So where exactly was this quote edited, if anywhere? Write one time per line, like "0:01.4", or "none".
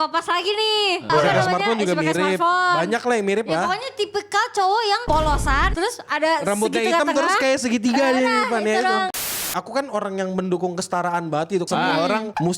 0:01.1
0:05.7
0:09.2
0:11.6